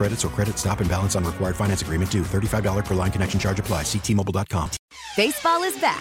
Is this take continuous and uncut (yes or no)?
no